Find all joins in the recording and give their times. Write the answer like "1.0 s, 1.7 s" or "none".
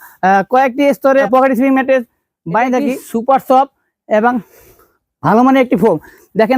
1.2 s, 3.1 s